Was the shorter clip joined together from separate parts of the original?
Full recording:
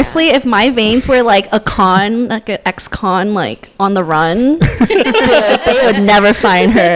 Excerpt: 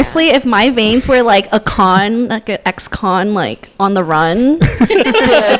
no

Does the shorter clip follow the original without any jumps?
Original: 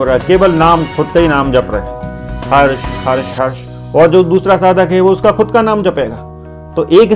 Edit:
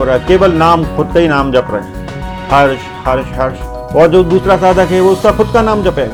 yes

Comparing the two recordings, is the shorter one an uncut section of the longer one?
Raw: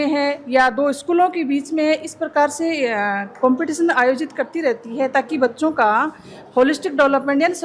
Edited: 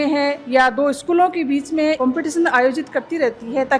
no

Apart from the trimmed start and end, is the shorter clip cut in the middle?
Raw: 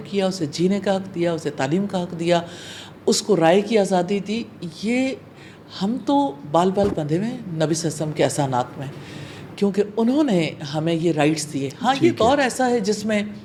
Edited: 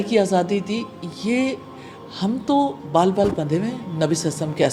no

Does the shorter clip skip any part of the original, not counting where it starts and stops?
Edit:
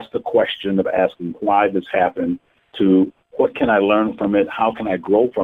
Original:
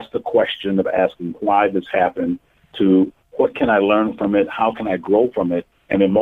no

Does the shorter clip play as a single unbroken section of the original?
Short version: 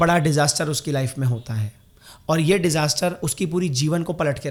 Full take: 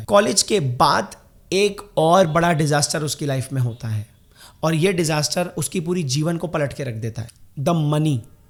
yes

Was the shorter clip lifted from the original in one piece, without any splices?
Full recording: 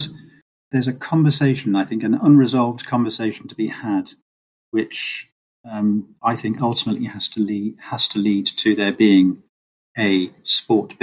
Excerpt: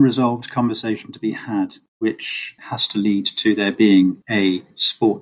no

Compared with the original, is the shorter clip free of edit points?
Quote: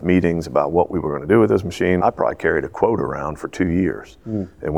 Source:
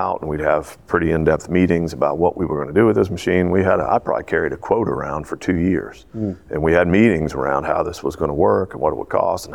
no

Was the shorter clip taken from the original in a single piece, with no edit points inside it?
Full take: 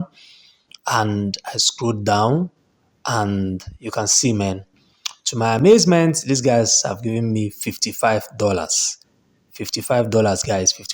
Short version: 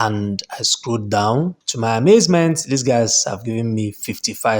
no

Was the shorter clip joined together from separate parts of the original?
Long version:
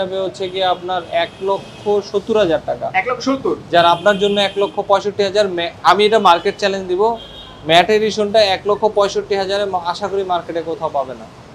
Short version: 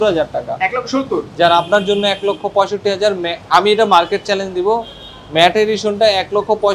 no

